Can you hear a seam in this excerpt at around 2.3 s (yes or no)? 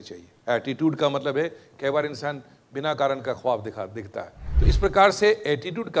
no